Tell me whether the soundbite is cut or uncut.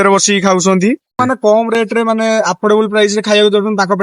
cut